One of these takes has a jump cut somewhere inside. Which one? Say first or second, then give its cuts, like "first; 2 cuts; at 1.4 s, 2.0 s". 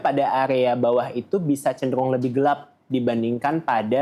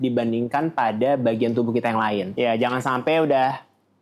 second; 1 cut; at 2.3 s